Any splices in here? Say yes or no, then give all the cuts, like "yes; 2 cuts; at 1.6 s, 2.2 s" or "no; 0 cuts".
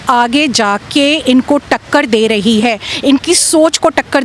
no; 0 cuts